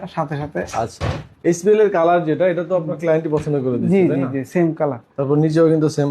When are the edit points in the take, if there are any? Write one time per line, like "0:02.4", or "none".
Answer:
none

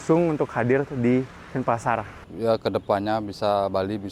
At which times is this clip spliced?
0:02.2

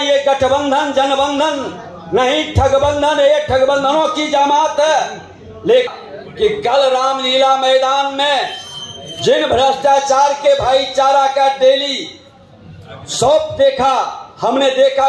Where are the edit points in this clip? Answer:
0:05.9

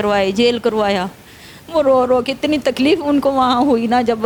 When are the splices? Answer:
none

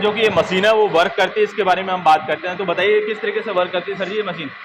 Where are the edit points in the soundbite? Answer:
none

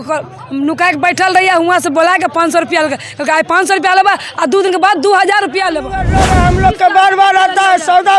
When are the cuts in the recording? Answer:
0:06.1

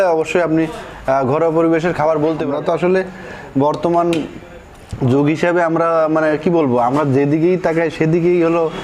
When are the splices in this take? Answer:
0:02.5

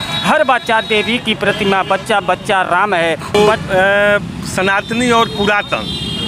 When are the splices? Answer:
0:03.3

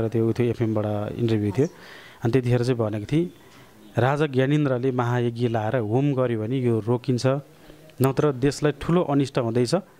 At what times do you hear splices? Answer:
none

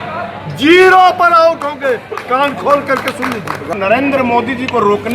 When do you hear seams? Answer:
0:03.7

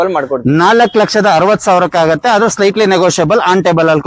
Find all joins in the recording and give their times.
none

